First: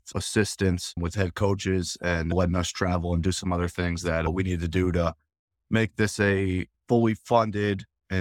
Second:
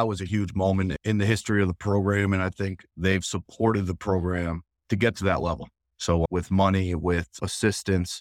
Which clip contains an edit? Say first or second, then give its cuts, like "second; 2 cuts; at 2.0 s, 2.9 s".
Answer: second; 2 cuts; at 1.0 s, 6.3 s